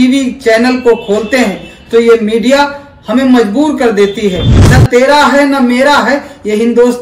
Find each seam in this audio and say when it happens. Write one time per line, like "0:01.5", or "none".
0:04.5